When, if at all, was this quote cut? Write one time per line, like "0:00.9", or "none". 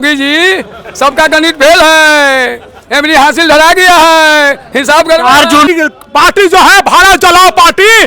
0:05.7